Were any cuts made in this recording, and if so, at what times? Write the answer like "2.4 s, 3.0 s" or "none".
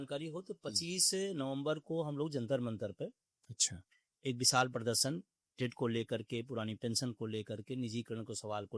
none